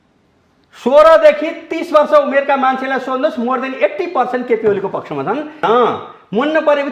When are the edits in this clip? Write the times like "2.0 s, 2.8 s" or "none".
5.6 s

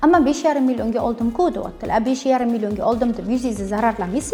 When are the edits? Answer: none

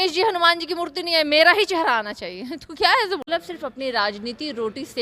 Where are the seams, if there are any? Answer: 3.2 s

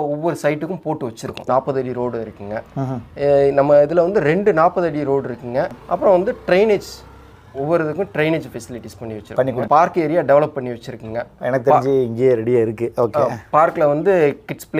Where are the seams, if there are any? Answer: 1.4 s, 5.8 s, 9.6 s

